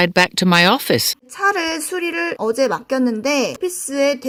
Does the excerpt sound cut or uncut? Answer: uncut